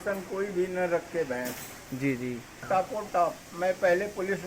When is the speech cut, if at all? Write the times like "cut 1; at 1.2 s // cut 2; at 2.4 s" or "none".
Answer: cut 1; at 2.7 s